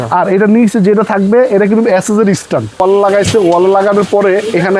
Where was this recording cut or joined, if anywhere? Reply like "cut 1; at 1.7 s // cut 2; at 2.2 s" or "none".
cut 1; at 2.8 s